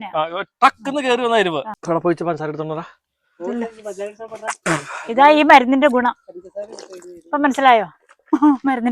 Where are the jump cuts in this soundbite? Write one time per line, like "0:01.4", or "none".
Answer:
0:01.7